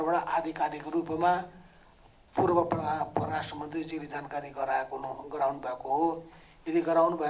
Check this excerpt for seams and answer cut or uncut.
uncut